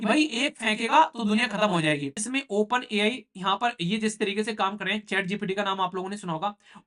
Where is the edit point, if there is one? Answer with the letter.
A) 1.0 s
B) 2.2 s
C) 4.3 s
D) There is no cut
B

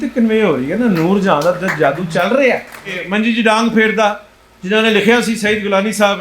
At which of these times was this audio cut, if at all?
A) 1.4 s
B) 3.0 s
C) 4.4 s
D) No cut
B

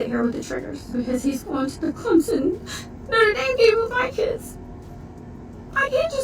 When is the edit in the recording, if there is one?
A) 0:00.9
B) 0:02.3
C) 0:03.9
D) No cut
A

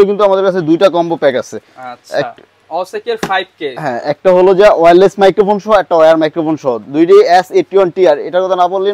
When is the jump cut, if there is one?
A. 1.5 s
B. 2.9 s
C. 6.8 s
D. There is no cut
D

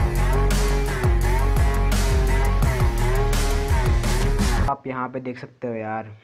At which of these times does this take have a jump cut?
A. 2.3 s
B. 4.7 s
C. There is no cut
B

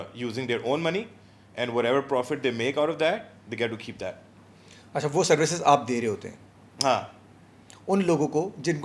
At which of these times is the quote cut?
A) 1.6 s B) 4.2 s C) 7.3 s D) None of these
D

